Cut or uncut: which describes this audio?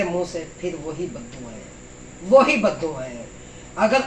uncut